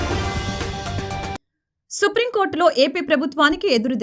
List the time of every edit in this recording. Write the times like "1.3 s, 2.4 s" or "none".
1.3 s